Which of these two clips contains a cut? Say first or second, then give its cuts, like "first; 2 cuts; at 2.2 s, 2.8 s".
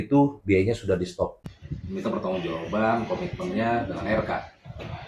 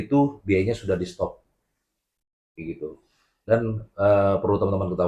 first; 1 cut; at 1.2 s